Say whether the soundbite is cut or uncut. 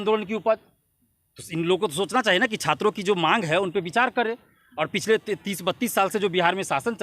uncut